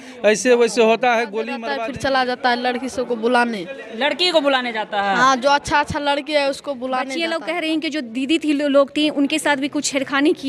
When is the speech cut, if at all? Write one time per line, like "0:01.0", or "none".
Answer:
0:01.6
0:07.2

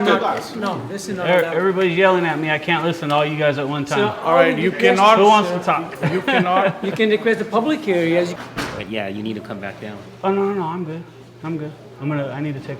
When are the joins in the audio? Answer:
0:08.3

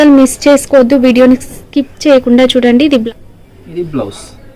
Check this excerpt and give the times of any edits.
0:03.0

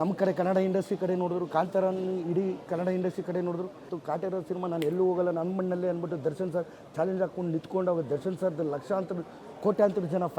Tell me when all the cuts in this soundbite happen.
0:03.9

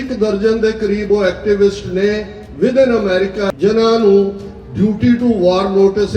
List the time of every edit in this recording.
0:03.5

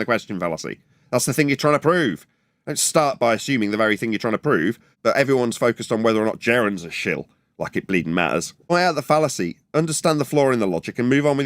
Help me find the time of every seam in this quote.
0:04.8
0:08.7

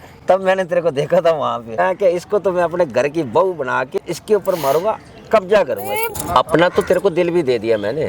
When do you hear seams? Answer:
0:01.8
0:04.0
0:06.1

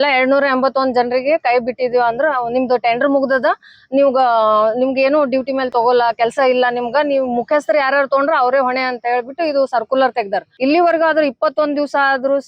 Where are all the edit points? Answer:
0:10.5

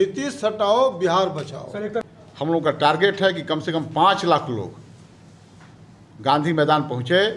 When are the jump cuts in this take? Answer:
0:02.1

